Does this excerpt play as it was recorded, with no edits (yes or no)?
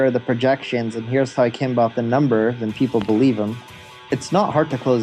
no